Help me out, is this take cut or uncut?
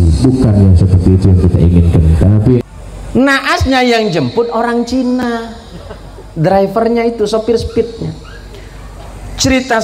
cut